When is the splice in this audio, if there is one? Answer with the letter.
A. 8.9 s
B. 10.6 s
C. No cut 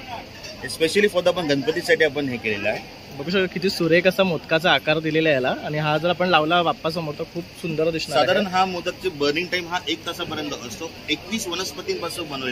C